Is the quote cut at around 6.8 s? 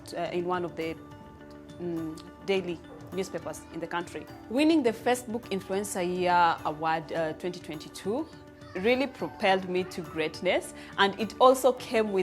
no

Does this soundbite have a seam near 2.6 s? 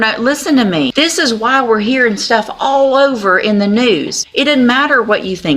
no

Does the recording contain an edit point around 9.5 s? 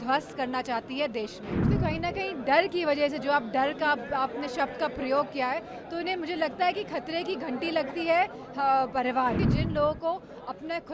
yes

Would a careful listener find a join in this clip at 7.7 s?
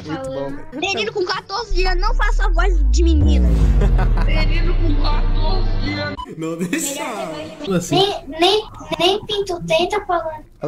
yes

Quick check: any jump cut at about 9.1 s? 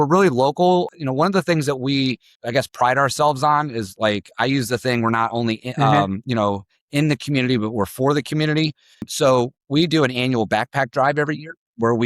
yes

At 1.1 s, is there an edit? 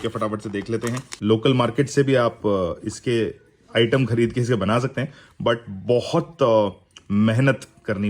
yes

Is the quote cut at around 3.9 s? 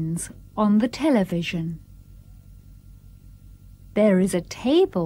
yes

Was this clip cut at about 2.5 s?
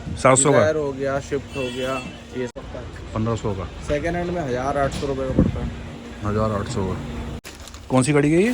yes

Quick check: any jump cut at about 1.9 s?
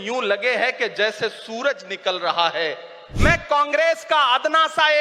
no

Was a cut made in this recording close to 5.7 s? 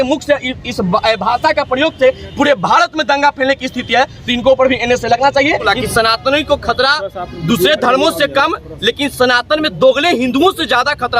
yes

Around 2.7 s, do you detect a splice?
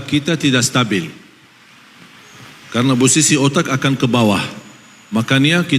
no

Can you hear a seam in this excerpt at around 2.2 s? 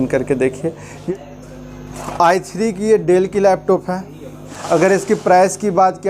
no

